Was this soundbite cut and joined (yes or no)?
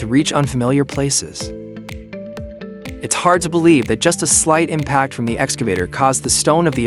yes